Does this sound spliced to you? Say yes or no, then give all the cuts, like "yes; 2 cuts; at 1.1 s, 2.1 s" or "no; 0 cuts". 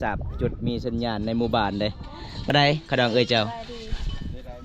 yes; 1 cut; at 2.5 s